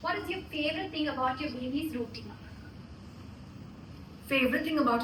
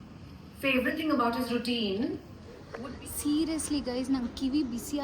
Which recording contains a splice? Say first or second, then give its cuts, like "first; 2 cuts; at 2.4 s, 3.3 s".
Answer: second; 1 cut; at 2.9 s